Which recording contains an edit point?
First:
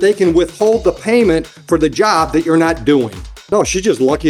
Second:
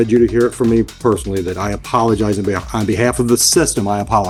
first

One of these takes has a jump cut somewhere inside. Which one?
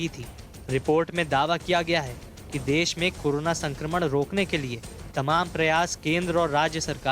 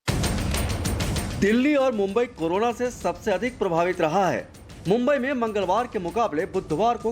second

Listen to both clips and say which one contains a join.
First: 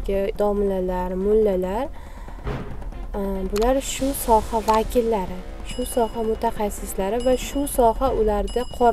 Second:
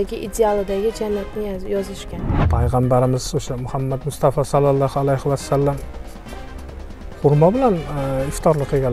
second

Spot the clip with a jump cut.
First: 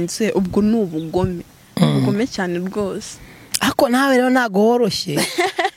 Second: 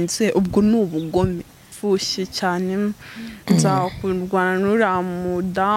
second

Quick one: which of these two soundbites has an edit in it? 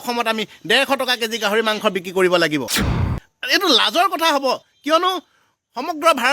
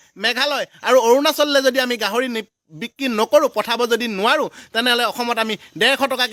first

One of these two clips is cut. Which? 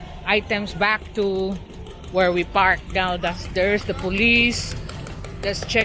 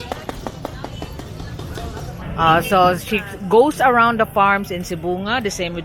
second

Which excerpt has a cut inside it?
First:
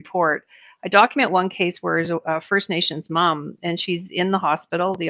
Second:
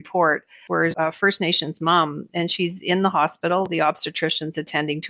second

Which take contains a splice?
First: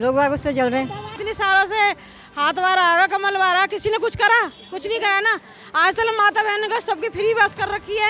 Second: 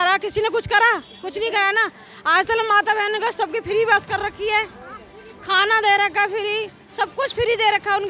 first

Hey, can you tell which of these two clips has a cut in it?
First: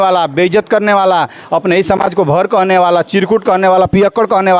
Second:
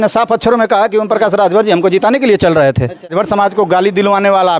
second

